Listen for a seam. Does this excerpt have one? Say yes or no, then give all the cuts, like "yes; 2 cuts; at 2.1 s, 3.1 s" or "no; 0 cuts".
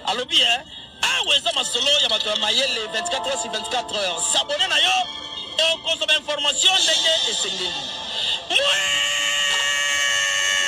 no; 0 cuts